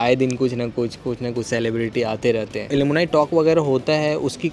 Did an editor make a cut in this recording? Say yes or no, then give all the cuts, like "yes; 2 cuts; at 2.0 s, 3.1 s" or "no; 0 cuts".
yes; 1 cut; at 2.7 s